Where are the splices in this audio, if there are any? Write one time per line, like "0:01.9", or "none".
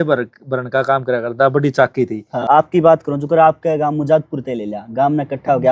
0:02.3